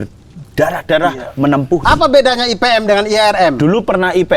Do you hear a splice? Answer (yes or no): yes